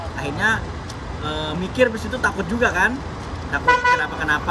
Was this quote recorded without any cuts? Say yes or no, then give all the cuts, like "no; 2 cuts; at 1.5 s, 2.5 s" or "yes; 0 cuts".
yes; 0 cuts